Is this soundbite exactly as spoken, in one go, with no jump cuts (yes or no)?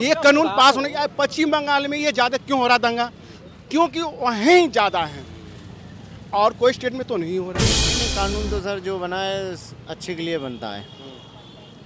no